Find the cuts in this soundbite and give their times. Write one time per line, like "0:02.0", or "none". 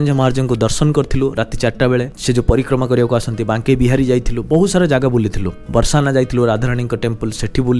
none